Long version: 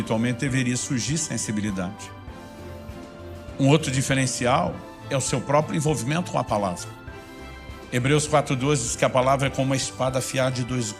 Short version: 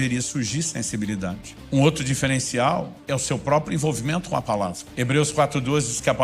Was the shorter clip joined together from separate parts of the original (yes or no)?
yes